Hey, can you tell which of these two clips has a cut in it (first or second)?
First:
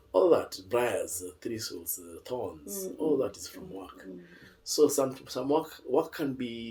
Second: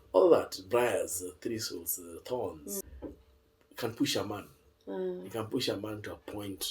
second